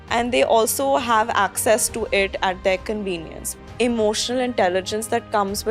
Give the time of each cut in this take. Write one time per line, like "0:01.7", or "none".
0:03.4